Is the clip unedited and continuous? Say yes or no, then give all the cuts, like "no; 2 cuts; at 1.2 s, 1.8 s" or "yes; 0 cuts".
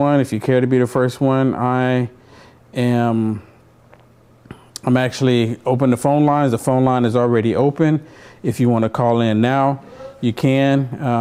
yes; 0 cuts